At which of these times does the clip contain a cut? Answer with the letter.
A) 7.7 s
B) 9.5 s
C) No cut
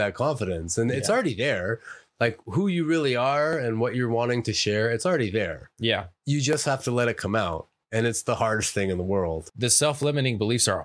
B